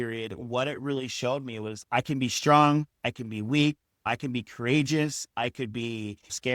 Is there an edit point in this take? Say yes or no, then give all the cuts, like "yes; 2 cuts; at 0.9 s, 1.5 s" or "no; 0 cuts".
yes; 1 cut; at 1.8 s